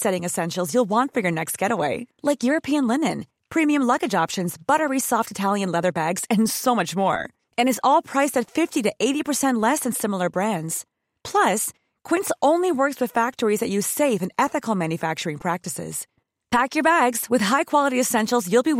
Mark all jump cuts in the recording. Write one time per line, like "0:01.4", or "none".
none

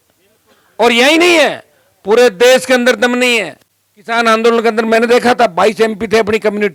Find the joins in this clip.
none

